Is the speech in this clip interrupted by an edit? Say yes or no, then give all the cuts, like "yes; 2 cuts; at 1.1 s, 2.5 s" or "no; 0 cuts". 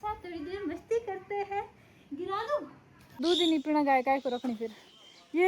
yes; 1 cut; at 3.2 s